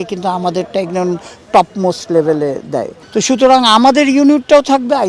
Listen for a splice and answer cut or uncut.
cut